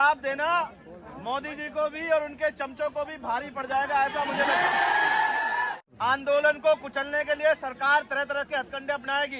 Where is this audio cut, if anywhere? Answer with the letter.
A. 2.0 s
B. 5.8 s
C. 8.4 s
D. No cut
B